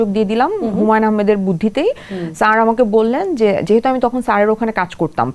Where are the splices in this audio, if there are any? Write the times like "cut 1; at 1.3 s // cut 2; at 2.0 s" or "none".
none